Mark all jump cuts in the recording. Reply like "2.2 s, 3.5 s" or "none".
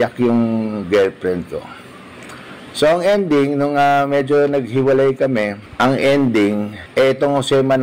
5.6 s, 6.8 s